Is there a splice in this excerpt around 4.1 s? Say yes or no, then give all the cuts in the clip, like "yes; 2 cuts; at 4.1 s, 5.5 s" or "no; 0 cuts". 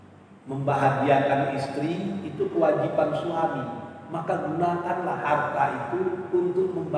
no; 0 cuts